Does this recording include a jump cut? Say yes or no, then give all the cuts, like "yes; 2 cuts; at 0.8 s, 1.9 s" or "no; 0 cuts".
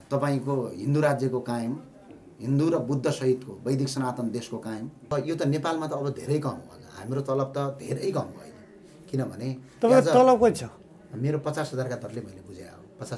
yes; 1 cut; at 5.1 s